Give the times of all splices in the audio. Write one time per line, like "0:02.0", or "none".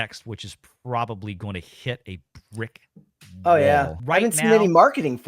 0:04.0